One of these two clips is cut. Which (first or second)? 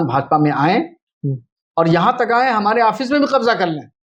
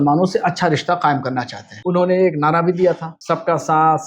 second